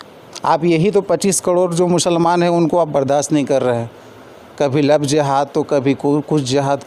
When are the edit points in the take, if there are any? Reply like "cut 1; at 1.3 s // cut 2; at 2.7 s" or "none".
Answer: none